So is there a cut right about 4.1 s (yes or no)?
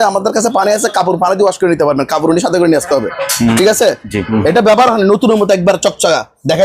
yes